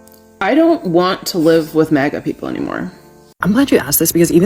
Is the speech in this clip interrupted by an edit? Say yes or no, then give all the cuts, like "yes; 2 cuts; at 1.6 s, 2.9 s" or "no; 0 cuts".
yes; 1 cut; at 3.4 s